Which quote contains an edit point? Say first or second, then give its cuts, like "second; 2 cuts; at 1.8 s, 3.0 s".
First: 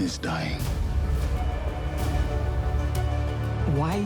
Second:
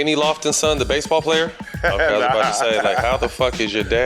second; 1 cut; at 1.7 s